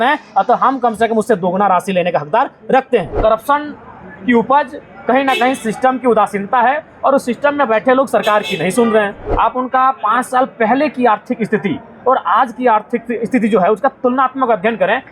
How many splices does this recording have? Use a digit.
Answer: 2